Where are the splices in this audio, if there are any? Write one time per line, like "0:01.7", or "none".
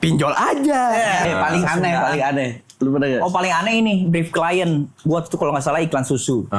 0:01.2